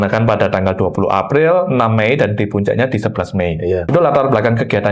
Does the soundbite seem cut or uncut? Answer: cut